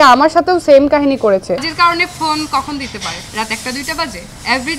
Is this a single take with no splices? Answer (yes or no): no